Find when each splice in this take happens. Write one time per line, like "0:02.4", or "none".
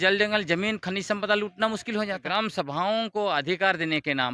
0:02.2